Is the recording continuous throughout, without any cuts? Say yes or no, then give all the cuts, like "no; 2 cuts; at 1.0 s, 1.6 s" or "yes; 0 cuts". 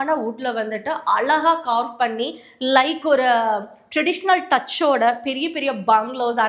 yes; 0 cuts